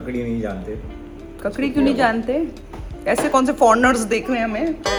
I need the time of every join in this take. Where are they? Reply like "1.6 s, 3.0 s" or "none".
none